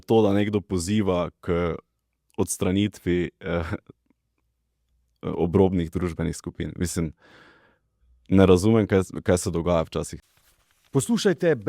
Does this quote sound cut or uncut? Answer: cut